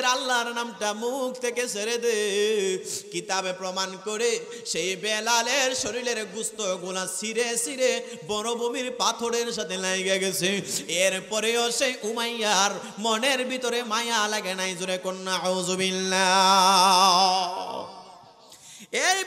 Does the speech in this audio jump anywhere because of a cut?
no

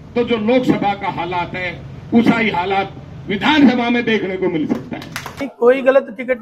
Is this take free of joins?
no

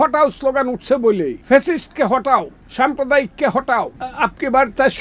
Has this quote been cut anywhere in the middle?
yes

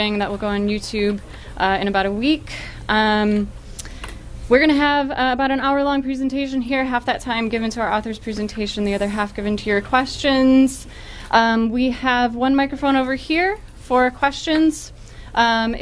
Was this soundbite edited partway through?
no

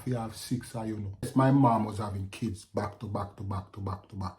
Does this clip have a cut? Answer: yes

